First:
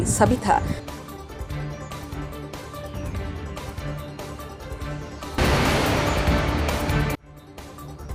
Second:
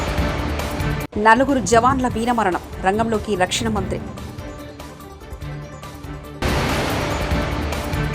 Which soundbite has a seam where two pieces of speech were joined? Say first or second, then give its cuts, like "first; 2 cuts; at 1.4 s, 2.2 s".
second; 1 cut; at 1.1 s